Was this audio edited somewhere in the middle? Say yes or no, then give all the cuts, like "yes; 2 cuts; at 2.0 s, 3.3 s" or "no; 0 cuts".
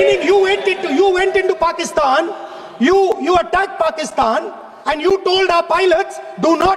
no; 0 cuts